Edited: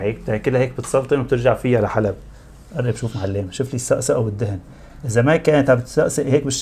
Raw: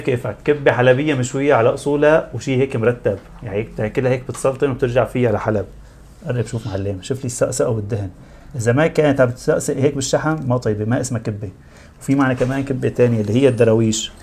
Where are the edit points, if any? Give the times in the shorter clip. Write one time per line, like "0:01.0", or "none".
none